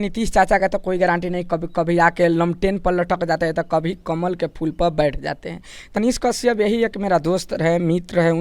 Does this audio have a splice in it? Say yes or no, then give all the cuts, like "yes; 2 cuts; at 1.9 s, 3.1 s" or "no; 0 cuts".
yes; 1 cut; at 5.9 s